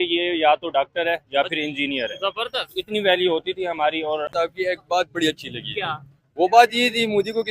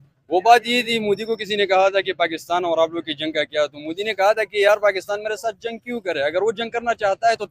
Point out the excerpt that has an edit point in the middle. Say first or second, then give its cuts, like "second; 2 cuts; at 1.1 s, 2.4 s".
first; 1 cut; at 4.3 s